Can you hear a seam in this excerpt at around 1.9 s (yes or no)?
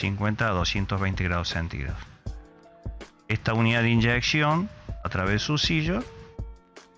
yes